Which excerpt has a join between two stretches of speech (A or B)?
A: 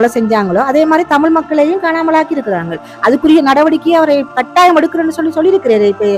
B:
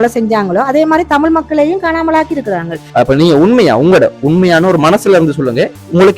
B